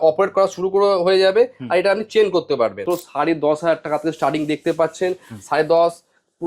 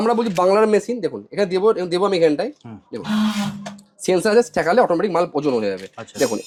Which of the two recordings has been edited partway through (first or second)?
first